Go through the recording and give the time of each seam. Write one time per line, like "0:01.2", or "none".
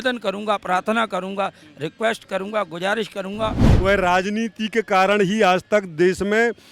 0:03.7